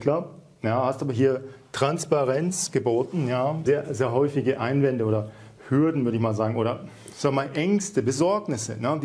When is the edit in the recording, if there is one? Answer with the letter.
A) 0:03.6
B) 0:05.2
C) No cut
A